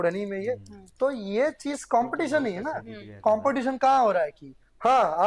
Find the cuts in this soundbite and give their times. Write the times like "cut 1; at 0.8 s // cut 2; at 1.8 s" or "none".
cut 1; at 3.1 s